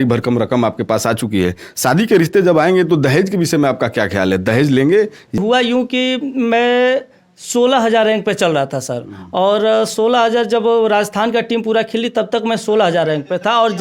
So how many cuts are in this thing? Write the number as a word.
one